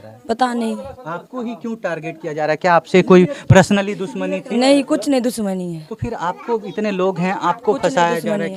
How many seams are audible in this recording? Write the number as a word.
zero